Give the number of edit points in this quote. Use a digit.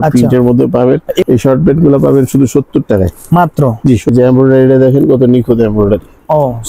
2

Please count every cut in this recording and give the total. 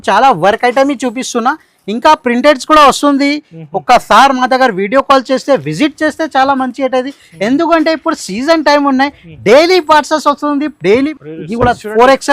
1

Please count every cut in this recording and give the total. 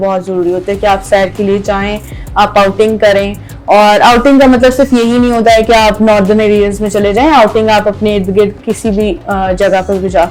0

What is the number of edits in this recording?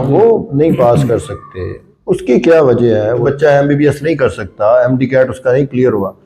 1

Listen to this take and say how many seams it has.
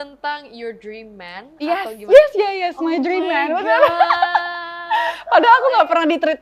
0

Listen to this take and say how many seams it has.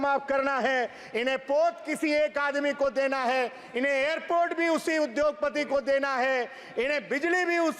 0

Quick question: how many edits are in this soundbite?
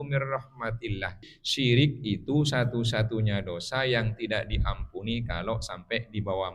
1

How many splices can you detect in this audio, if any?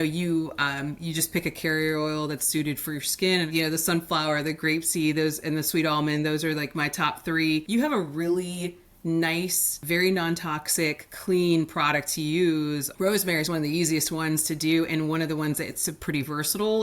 4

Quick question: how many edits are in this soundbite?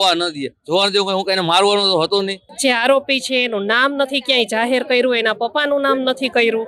1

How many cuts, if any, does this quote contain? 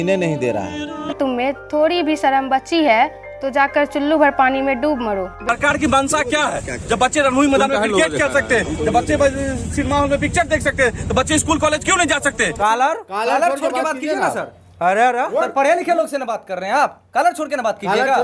3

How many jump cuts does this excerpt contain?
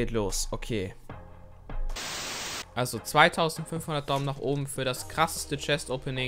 1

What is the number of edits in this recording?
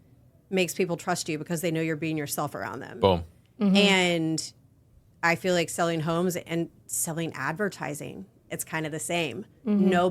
0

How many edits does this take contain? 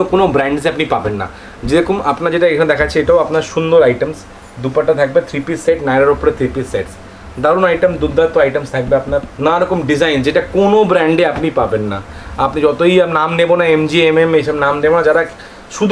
1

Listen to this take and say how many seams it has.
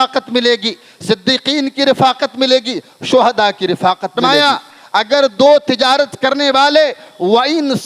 1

